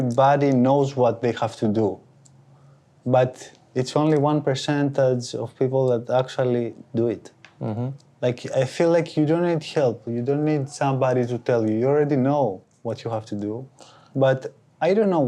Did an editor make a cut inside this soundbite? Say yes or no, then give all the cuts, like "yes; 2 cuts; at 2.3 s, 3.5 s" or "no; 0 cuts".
no; 0 cuts